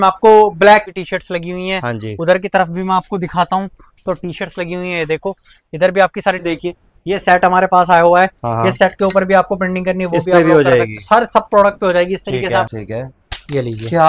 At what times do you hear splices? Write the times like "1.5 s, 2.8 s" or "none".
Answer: 0.9 s, 6.4 s, 12.7 s